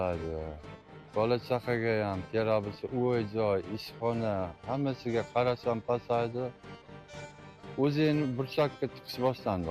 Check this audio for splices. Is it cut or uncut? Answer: uncut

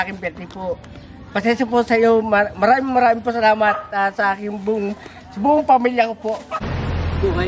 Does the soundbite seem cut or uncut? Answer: cut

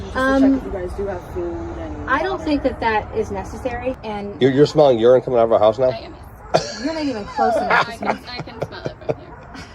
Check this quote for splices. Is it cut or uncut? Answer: cut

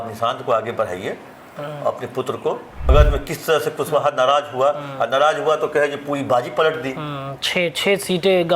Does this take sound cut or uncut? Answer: cut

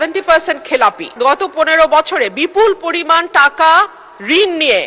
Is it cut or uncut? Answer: cut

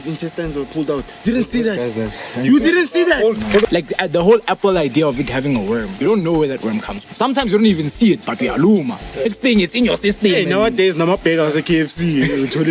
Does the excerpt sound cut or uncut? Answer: cut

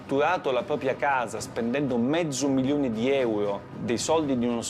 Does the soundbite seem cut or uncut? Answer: cut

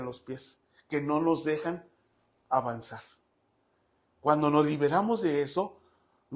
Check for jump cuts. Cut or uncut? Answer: uncut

